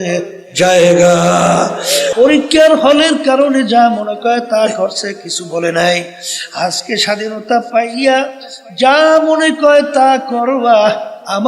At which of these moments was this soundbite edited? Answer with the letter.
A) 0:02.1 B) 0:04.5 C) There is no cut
A